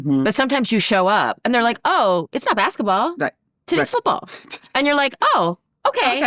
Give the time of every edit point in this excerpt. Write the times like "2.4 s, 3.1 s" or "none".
none